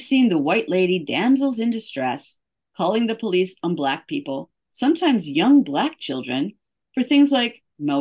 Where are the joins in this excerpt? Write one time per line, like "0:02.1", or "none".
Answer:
none